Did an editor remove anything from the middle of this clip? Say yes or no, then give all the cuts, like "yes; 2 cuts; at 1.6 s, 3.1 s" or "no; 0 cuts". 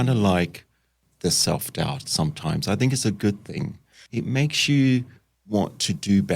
yes; 1 cut; at 4.0 s